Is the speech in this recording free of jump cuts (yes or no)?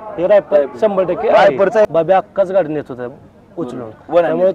no